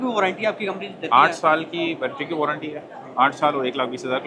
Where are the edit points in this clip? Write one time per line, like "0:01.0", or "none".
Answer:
none